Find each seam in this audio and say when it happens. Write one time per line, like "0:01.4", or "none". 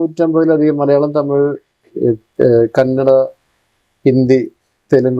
none